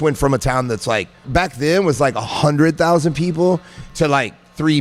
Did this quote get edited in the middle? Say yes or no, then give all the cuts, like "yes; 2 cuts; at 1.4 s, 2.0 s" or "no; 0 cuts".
yes; 2 cuts; at 1.2 s, 3.8 s